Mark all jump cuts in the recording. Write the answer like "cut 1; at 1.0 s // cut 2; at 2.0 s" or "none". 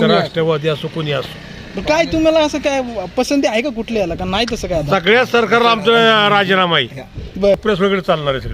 cut 1; at 7.6 s